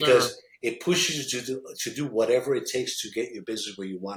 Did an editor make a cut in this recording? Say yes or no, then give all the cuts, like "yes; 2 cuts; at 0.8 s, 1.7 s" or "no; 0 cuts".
no; 0 cuts